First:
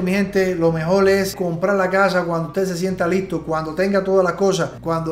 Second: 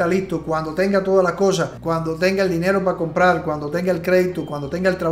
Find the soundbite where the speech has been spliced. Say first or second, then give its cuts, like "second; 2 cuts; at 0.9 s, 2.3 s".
first; 1 cut; at 1.3 s